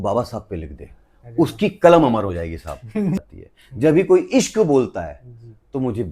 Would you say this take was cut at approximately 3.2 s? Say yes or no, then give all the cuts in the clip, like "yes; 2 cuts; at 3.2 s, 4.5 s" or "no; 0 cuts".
yes; 1 cut; at 3.2 s